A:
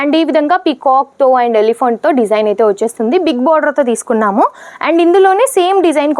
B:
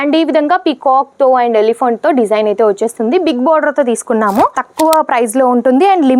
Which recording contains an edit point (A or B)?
B